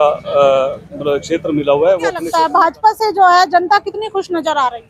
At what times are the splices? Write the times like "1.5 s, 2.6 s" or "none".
2.2 s